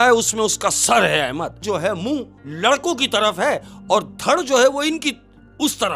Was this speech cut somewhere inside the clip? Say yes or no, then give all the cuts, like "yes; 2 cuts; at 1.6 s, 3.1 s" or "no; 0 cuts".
yes; 1 cut; at 1.6 s